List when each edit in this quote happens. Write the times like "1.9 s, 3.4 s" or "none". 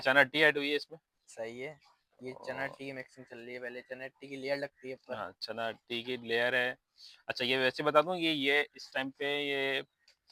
none